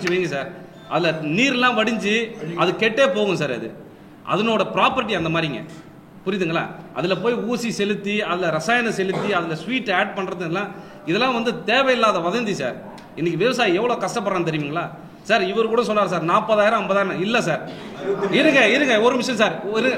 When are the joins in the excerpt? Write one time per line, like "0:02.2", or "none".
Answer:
none